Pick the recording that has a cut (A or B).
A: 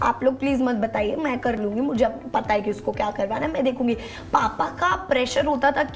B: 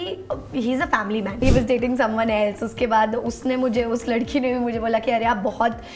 B